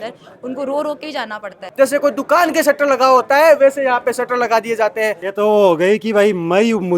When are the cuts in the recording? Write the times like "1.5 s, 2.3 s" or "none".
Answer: 1.6 s, 5.2 s